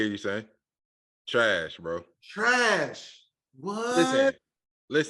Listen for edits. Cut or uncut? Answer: cut